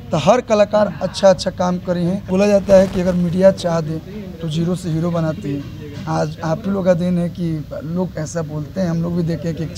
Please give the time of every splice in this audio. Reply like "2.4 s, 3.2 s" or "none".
2.3 s